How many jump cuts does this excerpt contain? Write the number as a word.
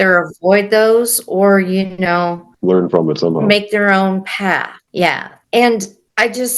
zero